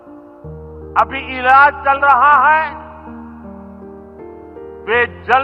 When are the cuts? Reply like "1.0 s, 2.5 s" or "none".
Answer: none